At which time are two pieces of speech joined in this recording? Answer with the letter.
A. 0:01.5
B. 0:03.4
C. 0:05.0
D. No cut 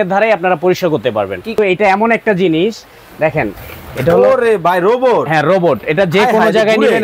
A